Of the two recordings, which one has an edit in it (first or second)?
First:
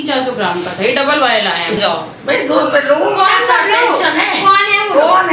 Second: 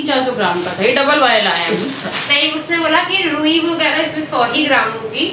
first